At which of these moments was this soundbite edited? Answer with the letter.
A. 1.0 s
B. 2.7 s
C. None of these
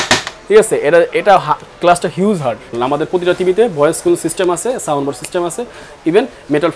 B